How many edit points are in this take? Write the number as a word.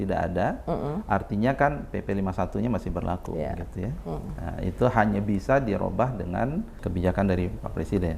one